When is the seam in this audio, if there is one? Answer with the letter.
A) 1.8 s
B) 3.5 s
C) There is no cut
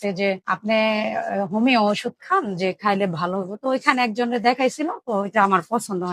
C